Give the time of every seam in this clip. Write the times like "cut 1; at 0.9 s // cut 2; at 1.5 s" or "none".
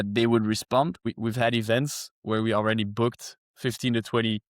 cut 1; at 1.1 s